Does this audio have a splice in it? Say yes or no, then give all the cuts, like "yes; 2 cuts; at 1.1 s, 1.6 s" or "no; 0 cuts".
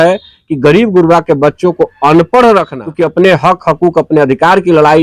yes; 1 cut; at 2.8 s